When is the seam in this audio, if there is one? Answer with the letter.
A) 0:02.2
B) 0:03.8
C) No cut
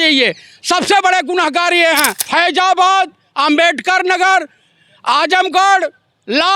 A